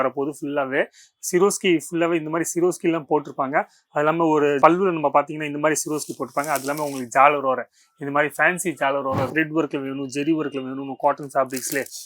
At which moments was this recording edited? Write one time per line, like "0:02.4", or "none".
0:09.3